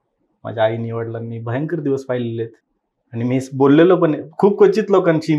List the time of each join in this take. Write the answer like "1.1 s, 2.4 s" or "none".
none